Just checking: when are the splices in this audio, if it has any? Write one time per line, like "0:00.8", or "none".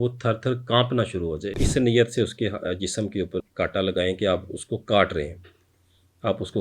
0:01.6
0:03.5